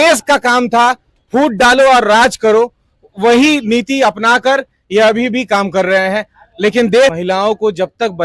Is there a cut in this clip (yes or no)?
yes